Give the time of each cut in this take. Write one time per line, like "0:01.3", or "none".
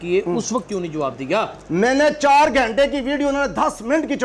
none